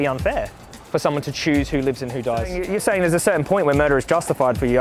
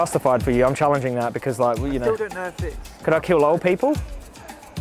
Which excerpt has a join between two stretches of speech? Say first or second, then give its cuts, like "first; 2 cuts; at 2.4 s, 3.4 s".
first; 1 cut; at 2.5 s